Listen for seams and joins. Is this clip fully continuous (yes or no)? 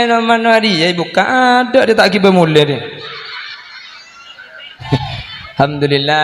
no